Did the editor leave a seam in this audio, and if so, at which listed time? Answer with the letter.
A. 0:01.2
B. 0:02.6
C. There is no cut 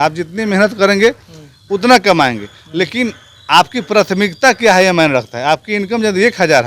C